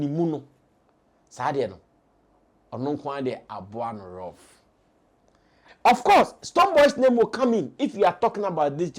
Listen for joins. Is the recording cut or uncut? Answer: cut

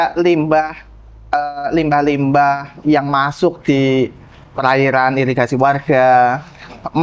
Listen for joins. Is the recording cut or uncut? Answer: uncut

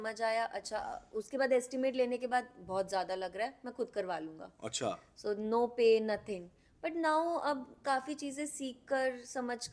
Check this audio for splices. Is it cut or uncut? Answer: uncut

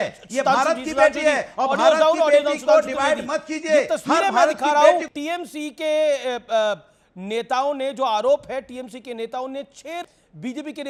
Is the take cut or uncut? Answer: uncut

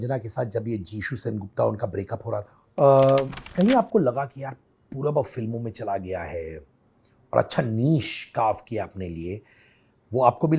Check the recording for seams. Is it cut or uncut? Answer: cut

